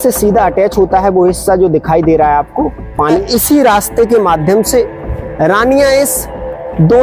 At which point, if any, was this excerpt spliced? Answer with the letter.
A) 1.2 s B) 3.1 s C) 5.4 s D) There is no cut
B